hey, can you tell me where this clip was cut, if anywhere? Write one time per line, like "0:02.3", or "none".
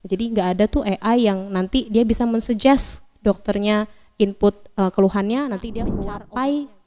0:06.0